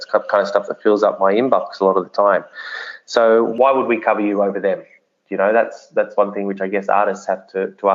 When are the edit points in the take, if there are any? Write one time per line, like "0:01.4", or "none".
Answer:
0:03.5

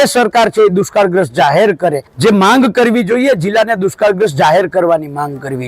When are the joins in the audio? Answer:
0:02.1

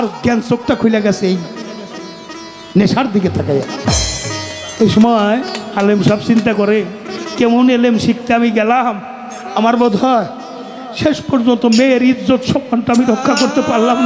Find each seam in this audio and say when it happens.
none

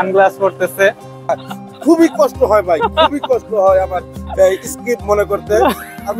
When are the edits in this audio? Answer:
0:01.3

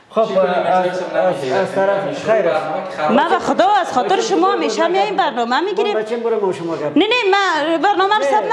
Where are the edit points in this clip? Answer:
none

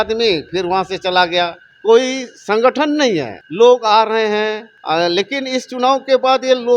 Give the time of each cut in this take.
0:01.7
0:03.4
0:04.7

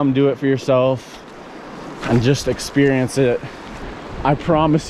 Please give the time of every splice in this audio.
none

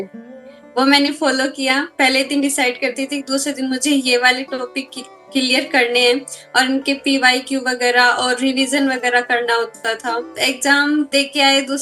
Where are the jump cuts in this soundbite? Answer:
0:01.9
0:10.3
0:11.1

